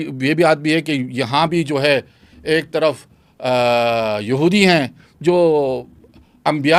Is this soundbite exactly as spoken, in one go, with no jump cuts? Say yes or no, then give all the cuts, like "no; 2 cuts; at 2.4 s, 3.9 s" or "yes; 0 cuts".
yes; 0 cuts